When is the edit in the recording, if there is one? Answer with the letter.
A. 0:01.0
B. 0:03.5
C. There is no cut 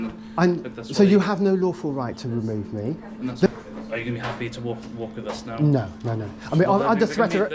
B